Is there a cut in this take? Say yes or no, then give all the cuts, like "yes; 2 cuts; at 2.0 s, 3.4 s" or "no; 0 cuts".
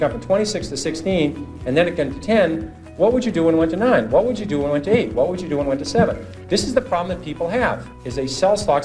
yes; 1 cut; at 7.9 s